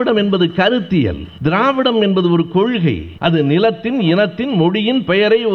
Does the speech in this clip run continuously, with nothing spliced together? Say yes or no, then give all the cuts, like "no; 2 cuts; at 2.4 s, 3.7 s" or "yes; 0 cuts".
no; 2 cuts; at 1.3 s, 3.1 s